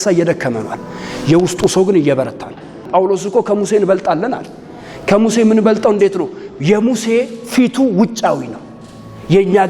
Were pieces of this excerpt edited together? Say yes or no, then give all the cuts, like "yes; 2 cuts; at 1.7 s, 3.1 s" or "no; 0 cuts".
yes; 1 cut; at 2.8 s